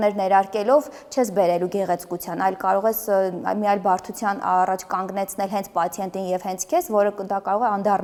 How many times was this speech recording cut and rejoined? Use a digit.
0